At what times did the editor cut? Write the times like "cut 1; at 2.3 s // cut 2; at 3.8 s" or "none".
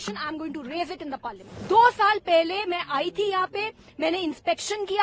cut 1; at 1.2 s